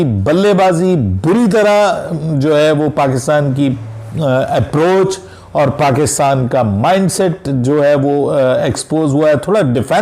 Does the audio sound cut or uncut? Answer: uncut